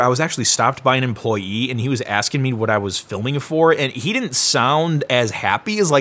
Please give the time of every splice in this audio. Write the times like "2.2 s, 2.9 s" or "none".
none